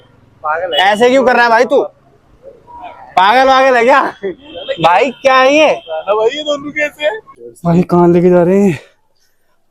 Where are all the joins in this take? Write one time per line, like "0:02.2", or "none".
0:07.4